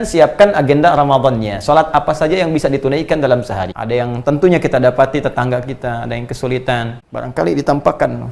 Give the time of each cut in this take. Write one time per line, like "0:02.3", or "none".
0:03.7
0:07.0

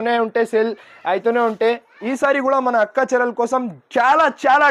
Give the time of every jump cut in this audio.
none

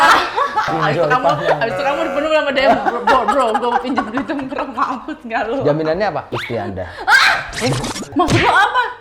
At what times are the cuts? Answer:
0:08.1

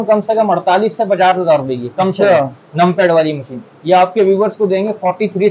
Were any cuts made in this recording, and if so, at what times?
none

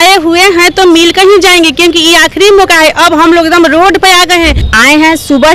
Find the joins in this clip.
0:04.6

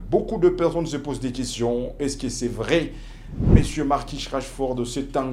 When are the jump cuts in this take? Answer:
none

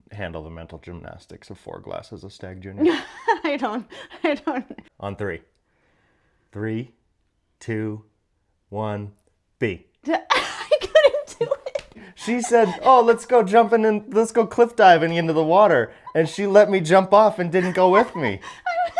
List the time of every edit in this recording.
0:04.9
0:12.1

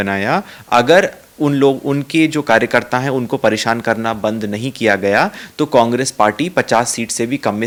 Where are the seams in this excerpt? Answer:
none

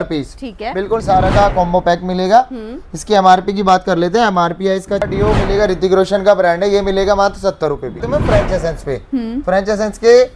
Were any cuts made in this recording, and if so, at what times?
0:01.0
0:05.1
0:08.0

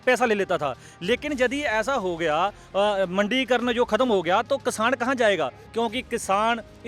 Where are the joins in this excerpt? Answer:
0:05.6

